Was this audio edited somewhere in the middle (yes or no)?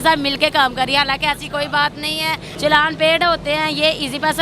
yes